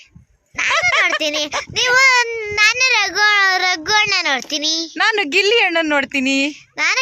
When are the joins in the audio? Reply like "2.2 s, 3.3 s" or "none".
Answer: none